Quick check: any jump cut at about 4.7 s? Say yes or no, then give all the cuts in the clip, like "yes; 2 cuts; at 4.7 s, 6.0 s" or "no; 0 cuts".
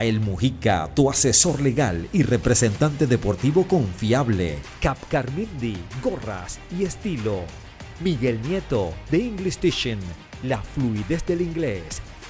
yes; 1 cut; at 4.7 s